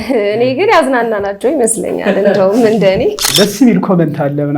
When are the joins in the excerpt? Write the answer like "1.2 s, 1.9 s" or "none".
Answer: 3.2 s